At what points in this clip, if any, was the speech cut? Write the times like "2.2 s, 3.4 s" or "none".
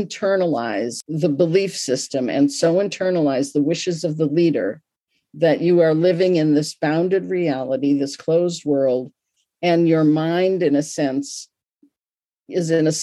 1.0 s